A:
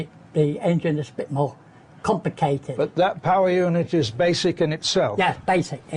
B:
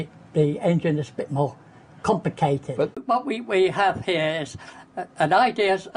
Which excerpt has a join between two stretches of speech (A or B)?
A